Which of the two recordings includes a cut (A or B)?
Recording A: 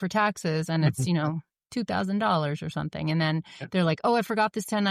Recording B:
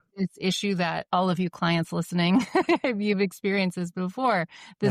B